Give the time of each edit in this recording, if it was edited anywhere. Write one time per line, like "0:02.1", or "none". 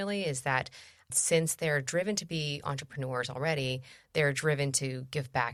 none